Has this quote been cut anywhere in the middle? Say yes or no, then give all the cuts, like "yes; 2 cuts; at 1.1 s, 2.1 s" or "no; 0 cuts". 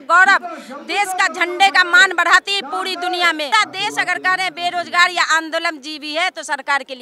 yes; 1 cut; at 3.5 s